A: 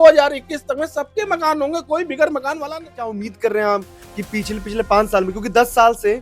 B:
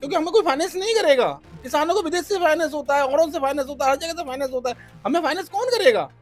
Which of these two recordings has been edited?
A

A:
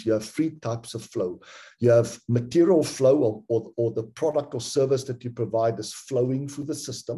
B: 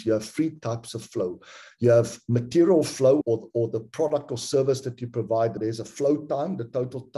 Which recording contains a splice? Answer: B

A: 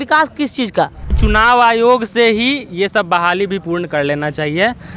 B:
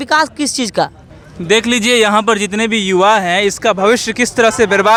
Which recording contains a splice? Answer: A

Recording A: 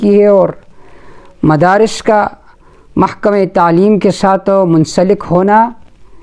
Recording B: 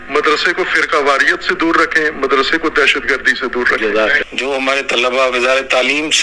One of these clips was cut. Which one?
B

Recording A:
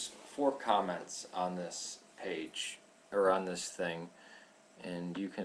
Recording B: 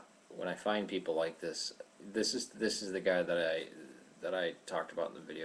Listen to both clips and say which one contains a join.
B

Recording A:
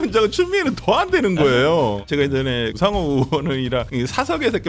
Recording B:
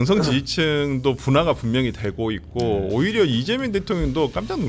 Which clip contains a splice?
A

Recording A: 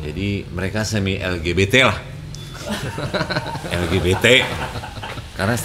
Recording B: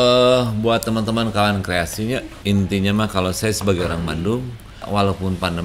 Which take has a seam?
B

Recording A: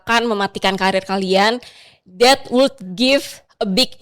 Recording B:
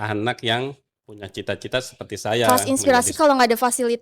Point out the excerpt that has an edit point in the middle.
B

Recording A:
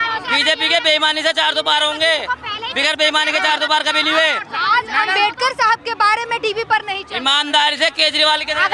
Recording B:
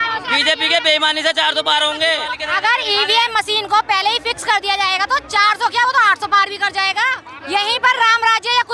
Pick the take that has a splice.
B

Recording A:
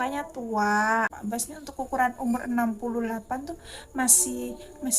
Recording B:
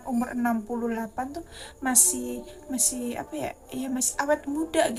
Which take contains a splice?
A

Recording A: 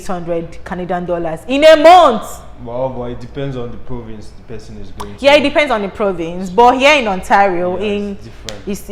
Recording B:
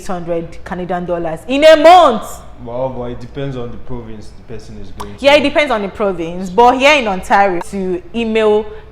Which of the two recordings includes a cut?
B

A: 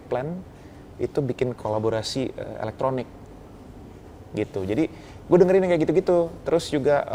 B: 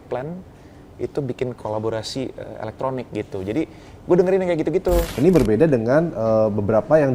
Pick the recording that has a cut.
B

